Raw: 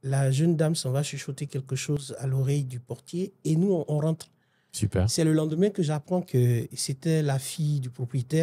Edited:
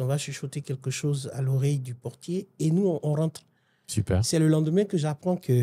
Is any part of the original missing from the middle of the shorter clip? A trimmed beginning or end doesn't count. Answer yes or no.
no